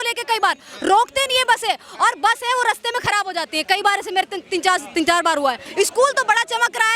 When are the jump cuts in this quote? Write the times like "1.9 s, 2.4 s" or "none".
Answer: 5.6 s